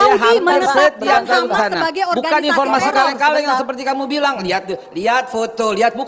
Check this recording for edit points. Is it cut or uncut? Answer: uncut